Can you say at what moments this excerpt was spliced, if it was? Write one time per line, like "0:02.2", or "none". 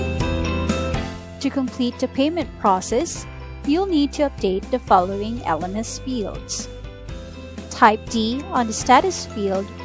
0:00.9

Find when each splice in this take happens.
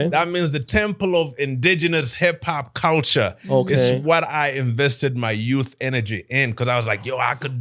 none

